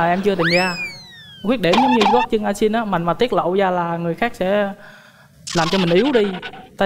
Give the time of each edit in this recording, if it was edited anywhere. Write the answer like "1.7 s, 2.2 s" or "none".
none